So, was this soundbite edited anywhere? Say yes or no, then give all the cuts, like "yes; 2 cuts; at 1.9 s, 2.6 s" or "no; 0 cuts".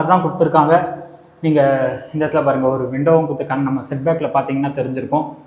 no; 0 cuts